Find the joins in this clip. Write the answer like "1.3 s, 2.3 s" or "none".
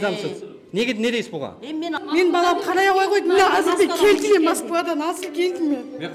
2.0 s